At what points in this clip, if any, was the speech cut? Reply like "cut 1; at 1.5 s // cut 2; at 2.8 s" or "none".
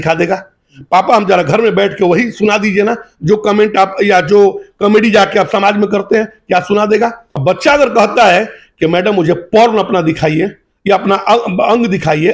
cut 1; at 7.3 s